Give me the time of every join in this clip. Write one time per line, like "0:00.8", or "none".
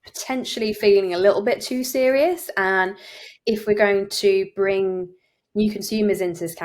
none